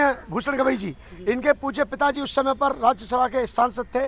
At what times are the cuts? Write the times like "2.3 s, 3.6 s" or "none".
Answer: none